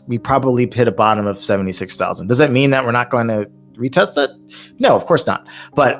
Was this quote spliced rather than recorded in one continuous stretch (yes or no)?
no